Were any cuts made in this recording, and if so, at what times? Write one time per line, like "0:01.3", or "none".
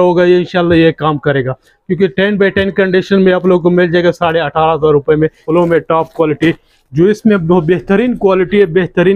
0:05.4